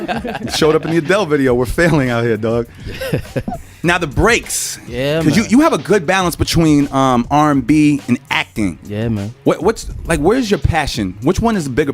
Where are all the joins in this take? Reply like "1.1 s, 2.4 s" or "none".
none

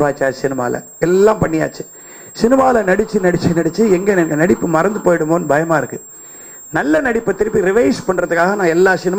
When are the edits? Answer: none

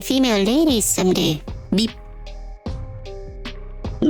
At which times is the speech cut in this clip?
none

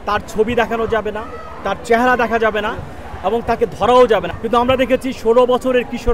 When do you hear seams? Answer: 4.3 s

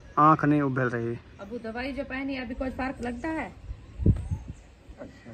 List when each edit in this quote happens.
1.3 s

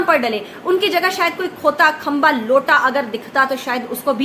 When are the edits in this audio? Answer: none

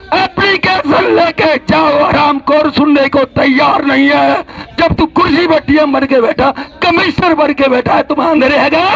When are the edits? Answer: none

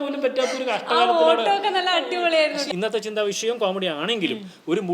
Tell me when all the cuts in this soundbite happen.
2.7 s

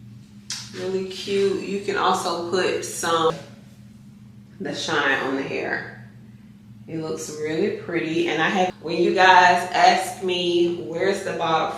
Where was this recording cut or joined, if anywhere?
3.3 s, 8.7 s

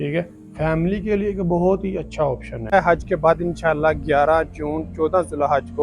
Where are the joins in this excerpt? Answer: 2.7 s

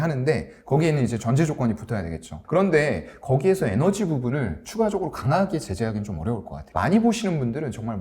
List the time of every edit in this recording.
2.3 s, 6.6 s

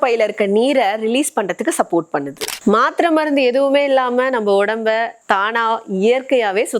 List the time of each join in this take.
2.5 s

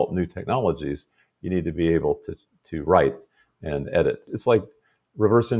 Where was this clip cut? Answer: 4.3 s

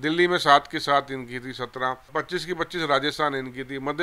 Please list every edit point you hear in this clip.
2.1 s

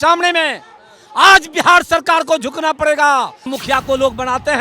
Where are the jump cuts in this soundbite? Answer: 3.4 s

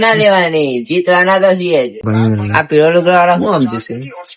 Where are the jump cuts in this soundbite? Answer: 2.0 s

